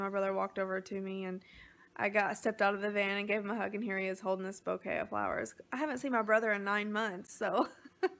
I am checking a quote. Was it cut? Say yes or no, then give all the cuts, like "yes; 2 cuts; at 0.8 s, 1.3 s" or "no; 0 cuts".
no; 0 cuts